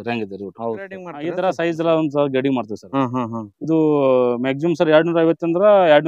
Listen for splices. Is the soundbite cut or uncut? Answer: cut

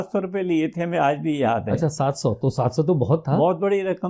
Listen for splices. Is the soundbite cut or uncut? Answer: uncut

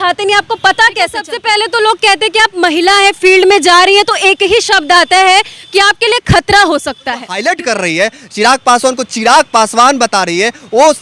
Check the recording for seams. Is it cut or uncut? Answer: cut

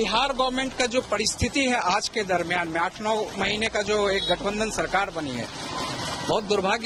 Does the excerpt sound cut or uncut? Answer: uncut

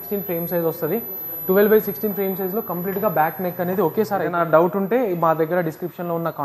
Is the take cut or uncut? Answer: cut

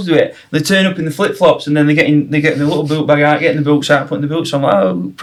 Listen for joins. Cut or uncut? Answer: uncut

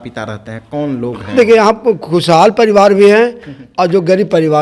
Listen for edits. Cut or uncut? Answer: uncut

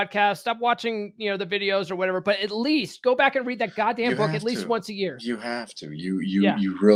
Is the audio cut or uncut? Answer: uncut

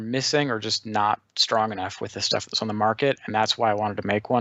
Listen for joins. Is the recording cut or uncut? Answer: uncut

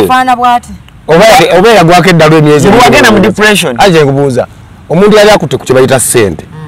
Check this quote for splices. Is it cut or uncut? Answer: uncut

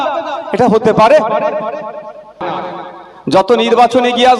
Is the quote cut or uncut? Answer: cut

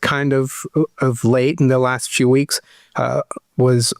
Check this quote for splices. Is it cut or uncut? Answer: uncut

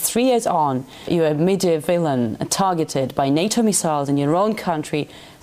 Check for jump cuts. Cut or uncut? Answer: cut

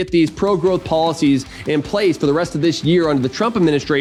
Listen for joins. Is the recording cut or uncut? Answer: uncut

